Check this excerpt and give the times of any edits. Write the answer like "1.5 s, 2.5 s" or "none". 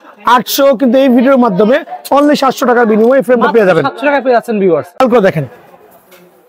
5.0 s